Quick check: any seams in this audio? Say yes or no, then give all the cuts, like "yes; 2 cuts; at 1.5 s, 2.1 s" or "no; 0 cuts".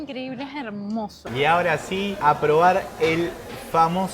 yes; 1 cut; at 1.2 s